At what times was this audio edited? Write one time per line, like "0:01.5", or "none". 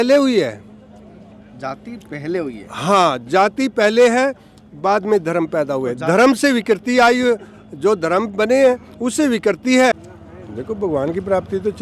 0:09.9

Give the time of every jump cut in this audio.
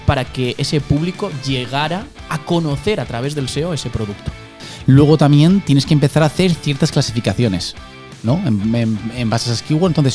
0:04.7

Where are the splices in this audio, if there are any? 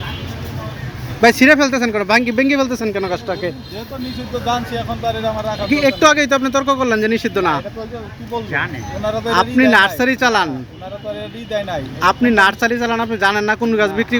none

